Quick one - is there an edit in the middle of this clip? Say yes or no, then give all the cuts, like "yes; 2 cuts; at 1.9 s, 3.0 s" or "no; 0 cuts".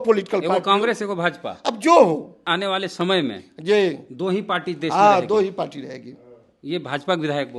yes; 1 cut; at 2.5 s